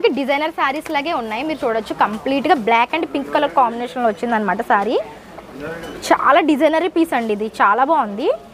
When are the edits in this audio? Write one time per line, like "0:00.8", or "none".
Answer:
none